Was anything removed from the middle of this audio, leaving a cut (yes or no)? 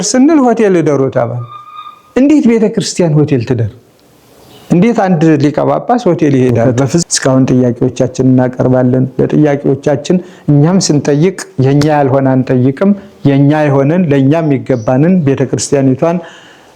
yes